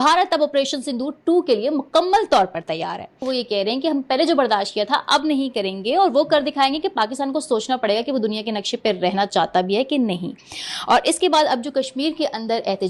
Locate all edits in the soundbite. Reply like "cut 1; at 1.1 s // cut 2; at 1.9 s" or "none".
none